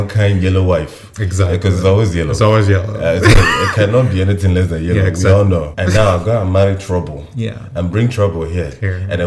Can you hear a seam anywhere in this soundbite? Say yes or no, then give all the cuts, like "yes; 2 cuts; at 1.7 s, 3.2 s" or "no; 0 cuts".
yes; 1 cut; at 5.7 s